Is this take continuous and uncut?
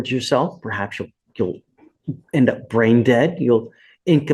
yes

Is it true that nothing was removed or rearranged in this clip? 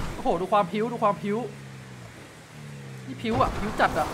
yes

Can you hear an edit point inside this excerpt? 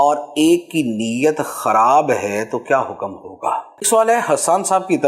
yes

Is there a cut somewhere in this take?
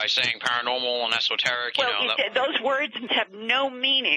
yes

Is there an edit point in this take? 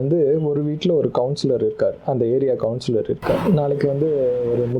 yes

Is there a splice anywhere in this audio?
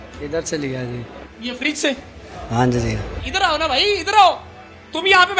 yes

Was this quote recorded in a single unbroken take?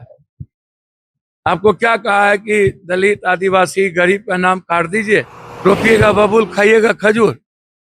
no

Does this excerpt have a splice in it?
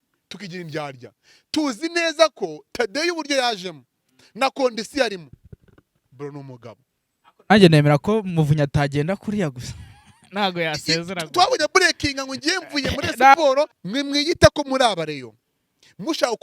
yes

